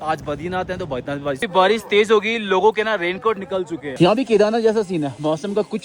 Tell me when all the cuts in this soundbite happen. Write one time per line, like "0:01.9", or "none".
0:01.5
0:03.9